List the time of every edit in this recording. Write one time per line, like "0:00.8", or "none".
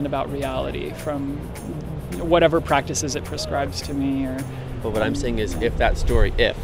none